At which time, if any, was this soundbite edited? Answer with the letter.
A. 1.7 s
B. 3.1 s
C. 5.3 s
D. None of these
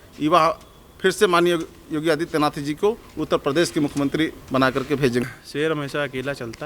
C